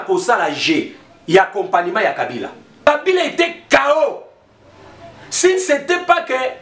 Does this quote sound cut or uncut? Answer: cut